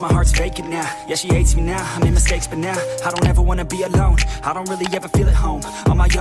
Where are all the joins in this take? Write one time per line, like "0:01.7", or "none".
0:04.4

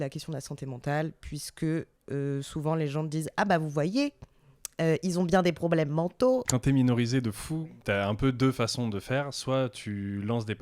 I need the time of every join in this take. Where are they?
0:06.5
0:07.6

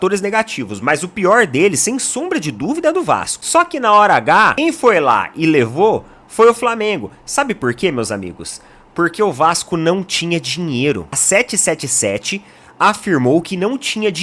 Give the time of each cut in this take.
0:03.3

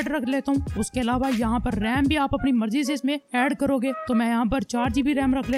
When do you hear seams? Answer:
none

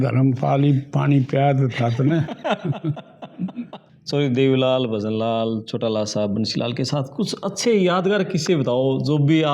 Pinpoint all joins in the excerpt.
0:03.9

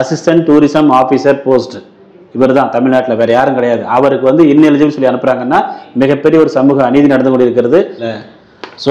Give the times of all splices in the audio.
0:08.0

